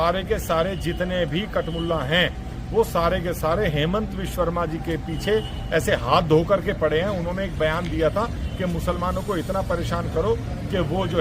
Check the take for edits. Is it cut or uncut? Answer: uncut